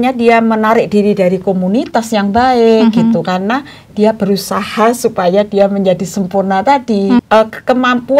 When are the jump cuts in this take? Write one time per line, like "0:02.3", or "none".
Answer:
0:07.2